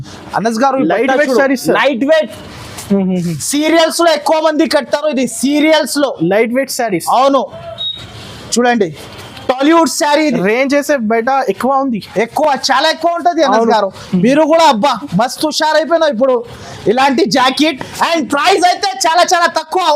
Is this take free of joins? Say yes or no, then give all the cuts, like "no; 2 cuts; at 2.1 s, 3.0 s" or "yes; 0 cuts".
yes; 0 cuts